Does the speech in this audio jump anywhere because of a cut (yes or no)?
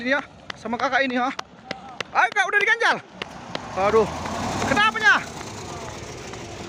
no